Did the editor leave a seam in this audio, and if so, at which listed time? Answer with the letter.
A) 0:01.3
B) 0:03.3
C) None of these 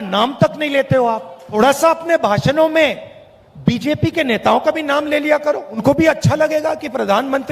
A